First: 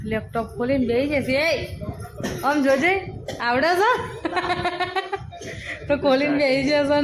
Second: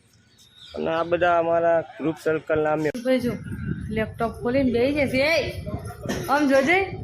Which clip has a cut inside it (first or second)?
second